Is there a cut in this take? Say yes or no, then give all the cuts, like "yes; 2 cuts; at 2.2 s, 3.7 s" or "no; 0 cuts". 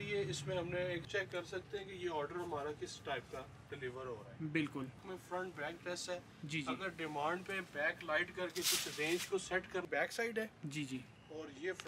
yes; 3 cuts; at 1.1 s, 5.0 s, 9.8 s